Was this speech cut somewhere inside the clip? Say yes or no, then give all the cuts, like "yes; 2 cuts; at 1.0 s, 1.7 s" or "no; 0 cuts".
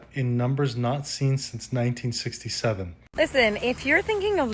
yes; 1 cut; at 3.0 s